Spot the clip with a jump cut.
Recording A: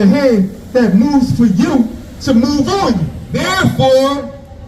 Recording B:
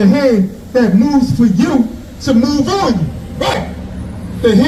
A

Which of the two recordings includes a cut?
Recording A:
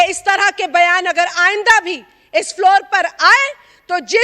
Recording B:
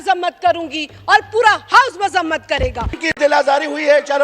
B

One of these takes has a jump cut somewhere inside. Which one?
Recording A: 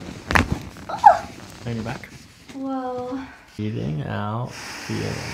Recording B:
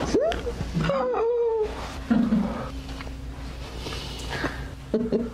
A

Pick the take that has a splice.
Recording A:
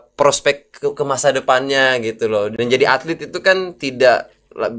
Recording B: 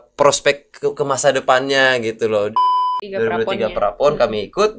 B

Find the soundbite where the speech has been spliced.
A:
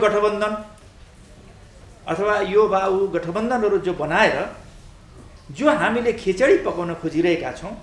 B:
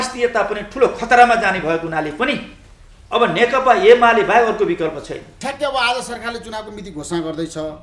B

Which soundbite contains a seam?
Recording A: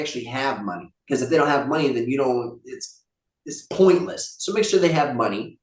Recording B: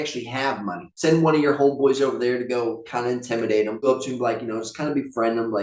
B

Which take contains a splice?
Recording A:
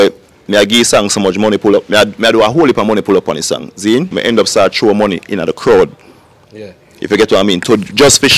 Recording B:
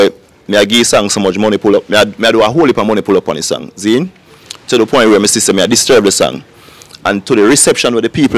A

